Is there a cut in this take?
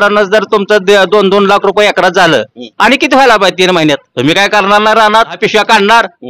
yes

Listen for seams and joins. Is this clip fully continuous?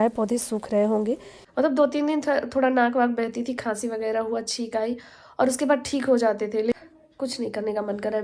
no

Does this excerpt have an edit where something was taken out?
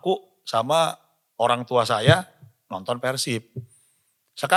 no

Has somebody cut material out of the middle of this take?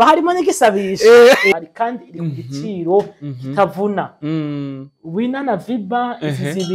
yes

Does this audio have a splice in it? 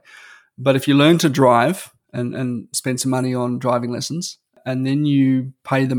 yes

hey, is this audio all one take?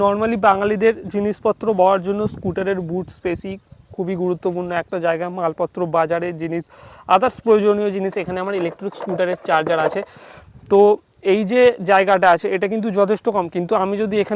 yes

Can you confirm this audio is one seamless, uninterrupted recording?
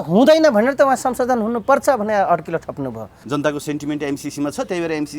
no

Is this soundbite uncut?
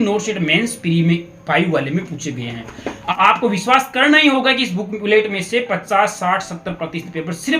no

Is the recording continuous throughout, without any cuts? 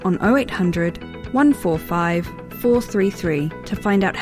yes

